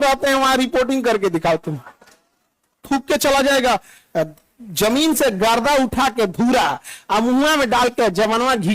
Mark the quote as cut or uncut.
cut